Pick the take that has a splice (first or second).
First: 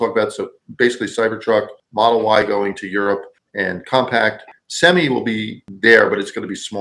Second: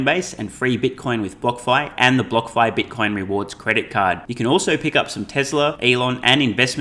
second